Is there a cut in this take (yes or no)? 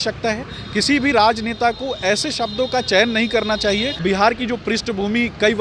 yes